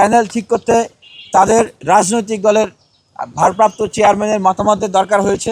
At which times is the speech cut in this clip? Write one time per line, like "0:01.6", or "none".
0:01.8